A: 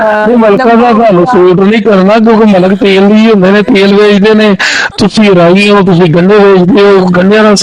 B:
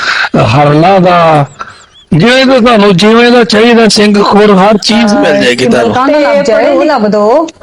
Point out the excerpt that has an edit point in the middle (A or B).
B